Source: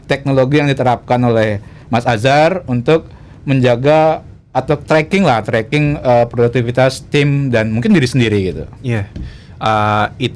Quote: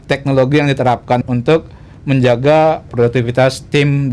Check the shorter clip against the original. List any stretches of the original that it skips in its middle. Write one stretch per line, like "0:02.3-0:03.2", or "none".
0:01.2-0:02.6
0:04.3-0:06.3